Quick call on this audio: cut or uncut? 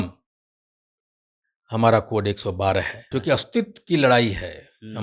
cut